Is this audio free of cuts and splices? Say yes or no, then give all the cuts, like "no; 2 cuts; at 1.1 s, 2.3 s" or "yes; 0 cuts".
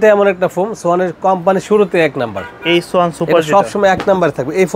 yes; 0 cuts